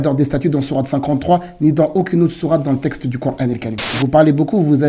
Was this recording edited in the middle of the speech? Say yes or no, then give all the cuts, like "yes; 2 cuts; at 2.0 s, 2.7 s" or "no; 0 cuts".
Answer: yes; 1 cut; at 3.8 s